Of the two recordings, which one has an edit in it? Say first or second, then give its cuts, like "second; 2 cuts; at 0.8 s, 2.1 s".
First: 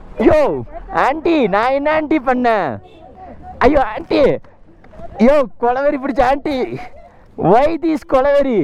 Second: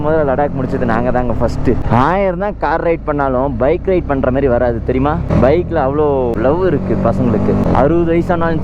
second; 4 cuts; at 1.8 s, 5.3 s, 6.3 s, 7.6 s